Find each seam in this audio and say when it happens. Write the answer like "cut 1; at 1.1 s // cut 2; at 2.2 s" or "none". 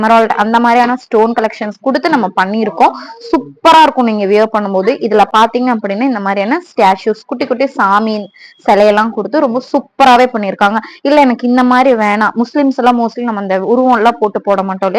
none